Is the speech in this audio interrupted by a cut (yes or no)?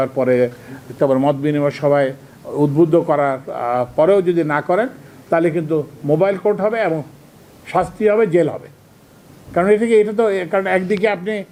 no